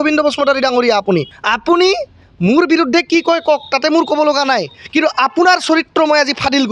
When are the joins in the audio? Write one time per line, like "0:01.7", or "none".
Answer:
0:01.3